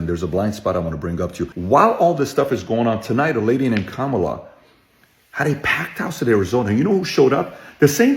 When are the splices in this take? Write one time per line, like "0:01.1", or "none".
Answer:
0:01.5